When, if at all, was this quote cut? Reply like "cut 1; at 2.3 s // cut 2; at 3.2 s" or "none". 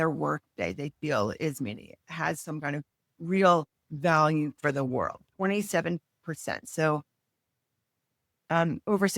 none